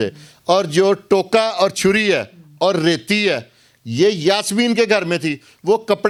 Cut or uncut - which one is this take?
uncut